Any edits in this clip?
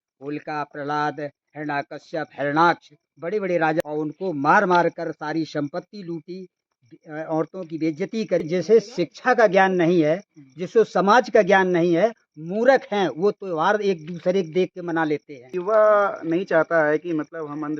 yes; 3 cuts; at 3.8 s, 8.5 s, 15.5 s

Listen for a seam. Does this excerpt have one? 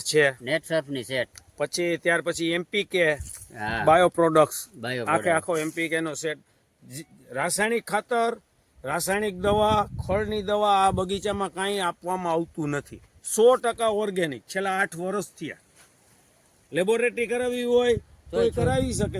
no; 0 cuts

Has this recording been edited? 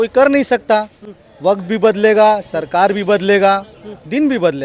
no; 0 cuts

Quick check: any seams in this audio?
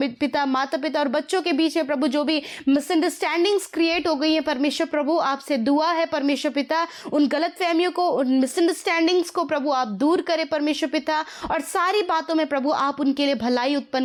no; 0 cuts

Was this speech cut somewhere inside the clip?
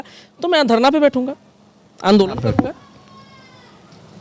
no; 0 cuts

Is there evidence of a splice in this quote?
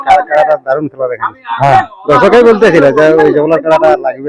no; 0 cuts

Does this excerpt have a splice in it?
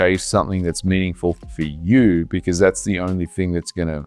no; 0 cuts

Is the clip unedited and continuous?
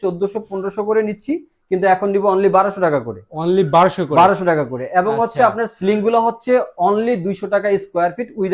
yes; 0 cuts

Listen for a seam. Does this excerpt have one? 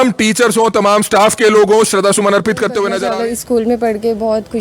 yes; 1 cut; at 2.9 s

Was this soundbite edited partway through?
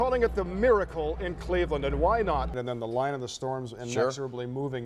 yes; 1 cut; at 2.5 s

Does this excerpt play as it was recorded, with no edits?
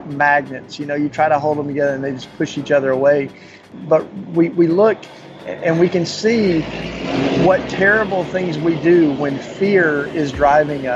no; 1 cut; at 3.7 s

